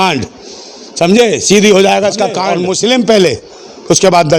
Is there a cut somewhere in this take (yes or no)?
yes